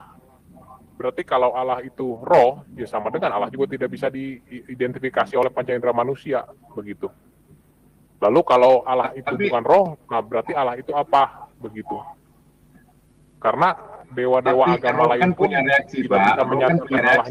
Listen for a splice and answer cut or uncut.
uncut